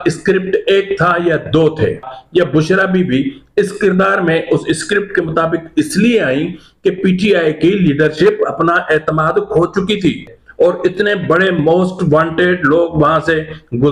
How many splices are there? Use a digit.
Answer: 2